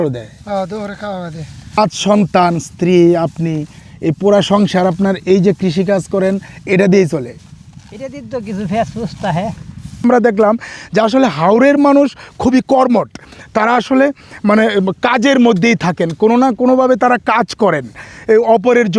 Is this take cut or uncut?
cut